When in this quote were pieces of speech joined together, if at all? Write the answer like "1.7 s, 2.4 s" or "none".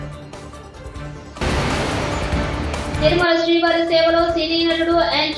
1.2 s

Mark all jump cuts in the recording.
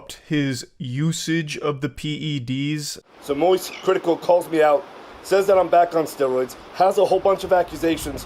none

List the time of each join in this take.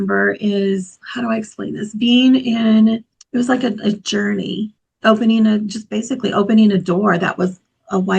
1.0 s, 3.1 s, 4.8 s

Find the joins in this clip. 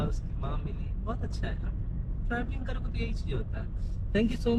none

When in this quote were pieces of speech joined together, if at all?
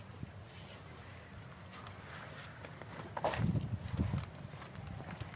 none

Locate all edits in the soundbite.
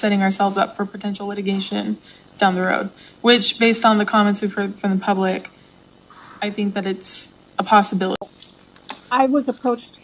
8.3 s

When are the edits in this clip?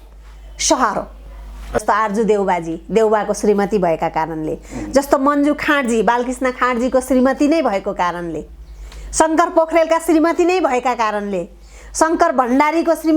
1.8 s

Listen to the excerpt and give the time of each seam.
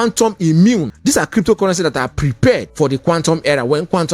0.9 s, 2.7 s

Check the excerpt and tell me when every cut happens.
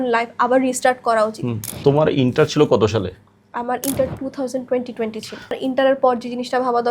1.8 s, 5.6 s

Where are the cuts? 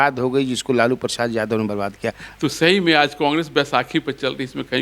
2.2 s

